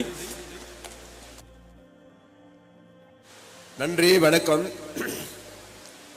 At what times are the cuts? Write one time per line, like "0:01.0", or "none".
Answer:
0:01.4
0:03.7